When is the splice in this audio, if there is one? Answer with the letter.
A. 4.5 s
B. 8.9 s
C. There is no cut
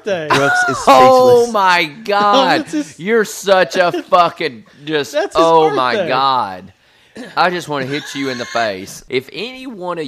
B